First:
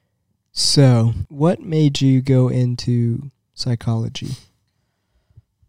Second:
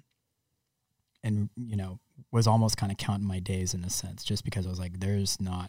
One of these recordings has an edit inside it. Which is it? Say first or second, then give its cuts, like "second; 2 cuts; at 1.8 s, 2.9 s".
first; 1 cut; at 1.2 s